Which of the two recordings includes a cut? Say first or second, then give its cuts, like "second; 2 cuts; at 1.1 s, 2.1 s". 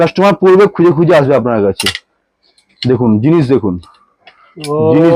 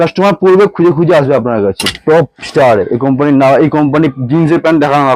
second; 1 cut; at 2.0 s